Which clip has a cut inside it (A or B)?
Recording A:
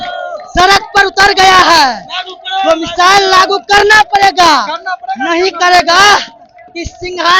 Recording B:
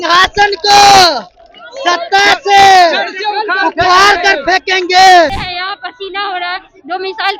B